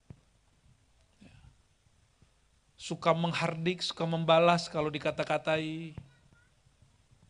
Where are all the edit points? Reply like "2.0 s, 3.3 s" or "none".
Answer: none